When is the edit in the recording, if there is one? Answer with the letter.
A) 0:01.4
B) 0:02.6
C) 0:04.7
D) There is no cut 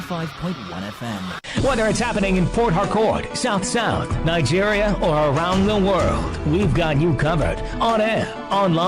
A